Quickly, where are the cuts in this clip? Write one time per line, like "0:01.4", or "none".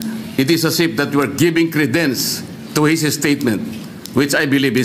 none